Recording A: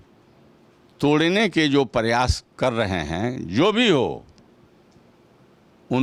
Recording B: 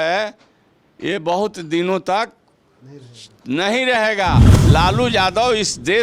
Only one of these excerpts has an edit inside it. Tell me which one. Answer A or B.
B